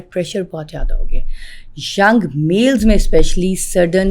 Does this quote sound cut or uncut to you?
uncut